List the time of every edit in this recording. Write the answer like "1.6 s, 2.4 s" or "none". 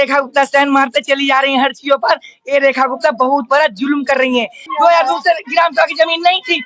4.6 s